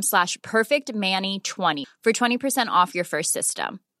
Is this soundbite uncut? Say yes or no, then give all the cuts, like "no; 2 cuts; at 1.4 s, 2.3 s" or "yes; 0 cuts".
no; 1 cut; at 1.8 s